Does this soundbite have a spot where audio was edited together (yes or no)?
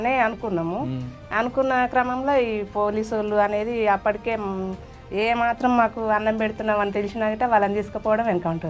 no